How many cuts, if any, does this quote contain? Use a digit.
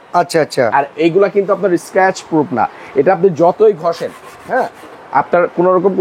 0